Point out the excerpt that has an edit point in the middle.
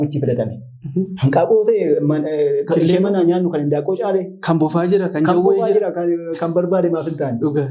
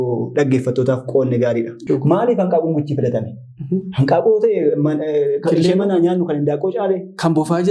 second; 1 cut; at 1.7 s

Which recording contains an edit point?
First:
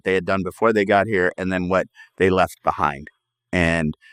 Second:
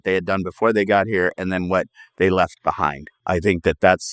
second; 1 cut; at 3.1 s

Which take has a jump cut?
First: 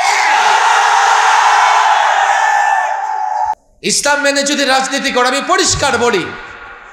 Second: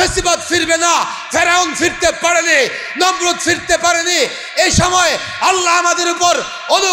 first; 1 cut; at 3.5 s

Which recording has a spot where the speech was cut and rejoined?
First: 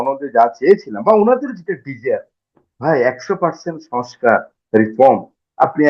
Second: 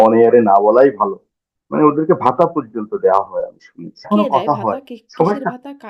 second; 1 cut; at 4.1 s

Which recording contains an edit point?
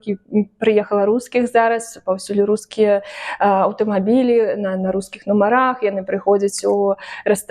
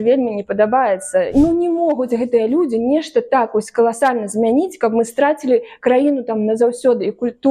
second; 1 cut; at 1.3 s

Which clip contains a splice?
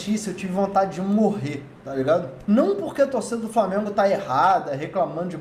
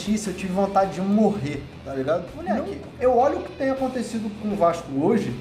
second; 1 cut; at 2.8 s

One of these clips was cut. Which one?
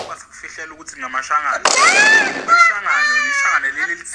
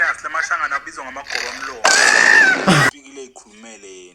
second; 1 cut; at 2.9 s

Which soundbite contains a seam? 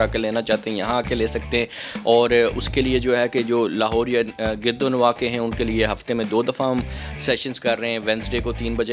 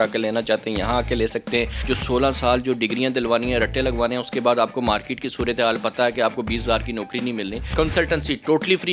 second; 2 cuts; at 1.8 s, 7.7 s

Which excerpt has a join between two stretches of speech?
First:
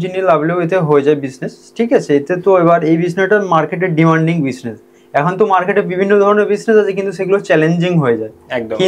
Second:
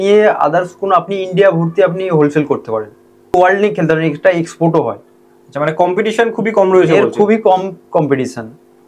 second; 1 cut; at 3.3 s

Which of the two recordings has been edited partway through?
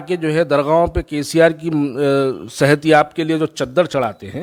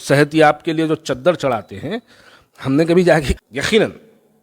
second; 1 cut; at 3.3 s

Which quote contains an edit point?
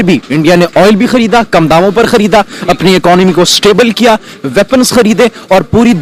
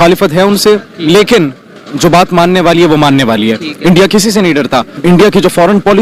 second; 1 cut; at 4.9 s

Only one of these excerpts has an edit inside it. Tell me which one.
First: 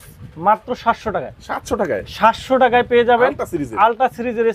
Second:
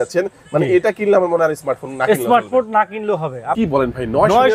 second; 1 cut; at 3.5 s

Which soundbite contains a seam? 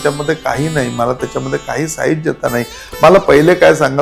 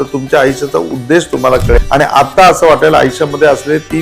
second; 1 cut; at 1.8 s

